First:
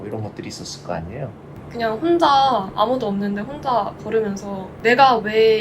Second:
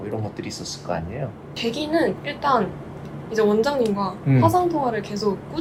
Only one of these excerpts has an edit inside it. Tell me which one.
first; 2 cuts; at 1.5 s, 4.7 s

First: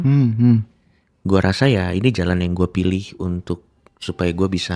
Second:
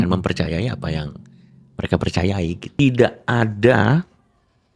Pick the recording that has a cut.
second; 1 cut; at 2.6 s

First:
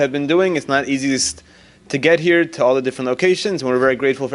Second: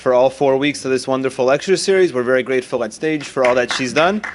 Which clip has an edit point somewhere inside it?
second; 1 cut; at 1.3 s

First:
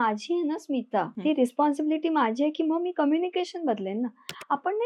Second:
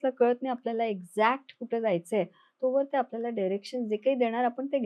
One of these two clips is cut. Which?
first; 1 cut; at 1.1 s

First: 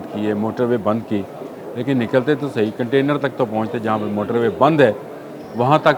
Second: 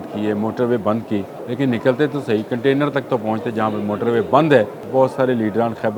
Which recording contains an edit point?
second; 2 cuts; at 1.4 s, 4.8 s

